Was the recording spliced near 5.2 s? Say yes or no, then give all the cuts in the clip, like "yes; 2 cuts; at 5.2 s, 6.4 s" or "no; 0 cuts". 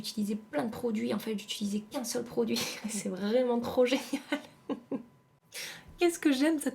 yes; 1 cut; at 5.2 s